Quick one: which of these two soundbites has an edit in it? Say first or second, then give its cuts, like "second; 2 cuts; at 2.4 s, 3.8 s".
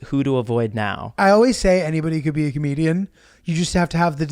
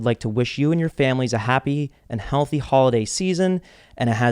first; 1 cut; at 1.2 s